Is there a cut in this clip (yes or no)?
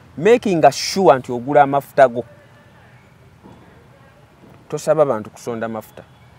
no